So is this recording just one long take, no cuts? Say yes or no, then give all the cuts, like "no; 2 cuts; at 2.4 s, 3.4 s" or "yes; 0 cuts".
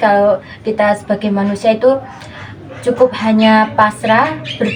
yes; 0 cuts